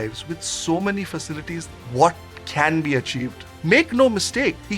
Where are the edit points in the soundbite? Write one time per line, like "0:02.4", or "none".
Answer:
0:01.7
0:03.4